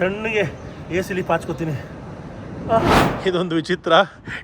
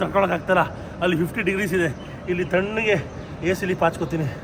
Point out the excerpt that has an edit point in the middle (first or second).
first